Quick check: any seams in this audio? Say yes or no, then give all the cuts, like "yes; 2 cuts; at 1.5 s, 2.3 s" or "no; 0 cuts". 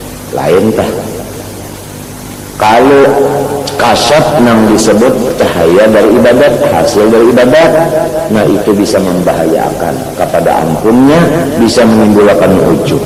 no; 0 cuts